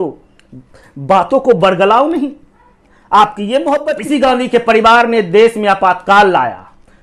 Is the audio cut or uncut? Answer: cut